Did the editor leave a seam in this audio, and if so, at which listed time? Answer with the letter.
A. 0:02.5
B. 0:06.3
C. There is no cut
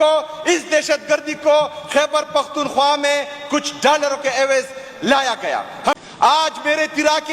B